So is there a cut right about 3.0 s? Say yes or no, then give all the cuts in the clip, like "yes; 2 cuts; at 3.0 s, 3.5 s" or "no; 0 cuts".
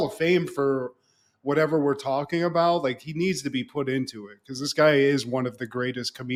no; 0 cuts